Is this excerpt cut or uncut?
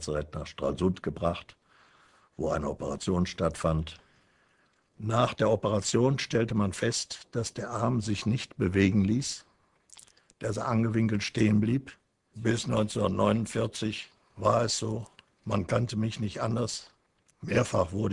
cut